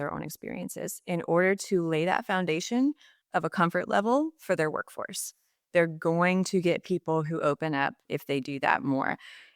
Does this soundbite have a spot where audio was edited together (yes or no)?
yes